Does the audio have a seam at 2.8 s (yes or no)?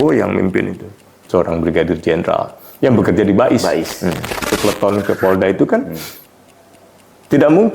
no